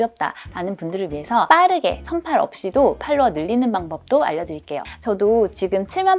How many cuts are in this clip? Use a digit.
2